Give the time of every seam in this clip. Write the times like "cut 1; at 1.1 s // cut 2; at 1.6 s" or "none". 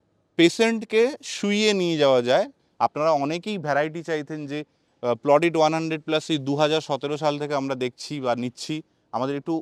cut 1; at 2.6 s

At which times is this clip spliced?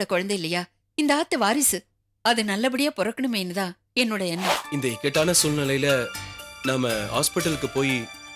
cut 1; at 4.6 s

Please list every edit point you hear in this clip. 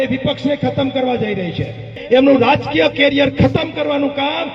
cut 1; at 1.9 s

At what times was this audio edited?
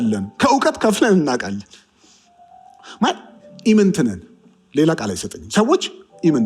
none

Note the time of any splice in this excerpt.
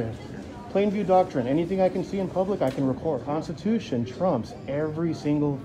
cut 1; at 3.2 s

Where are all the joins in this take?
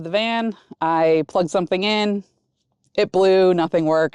none

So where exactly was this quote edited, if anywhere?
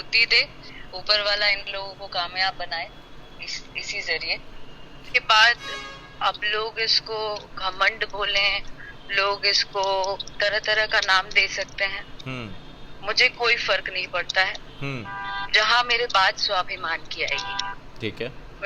cut 1; at 5.1 s

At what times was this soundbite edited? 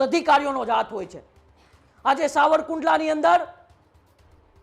none

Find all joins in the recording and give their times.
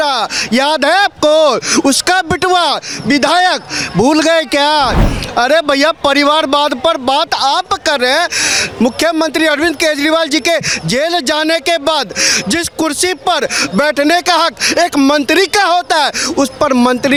none

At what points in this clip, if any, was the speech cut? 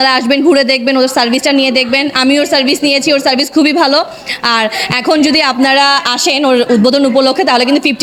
none

